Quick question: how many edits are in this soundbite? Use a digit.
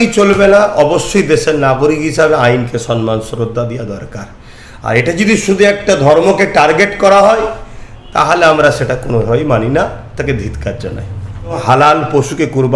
1